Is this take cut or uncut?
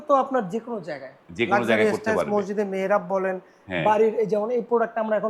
uncut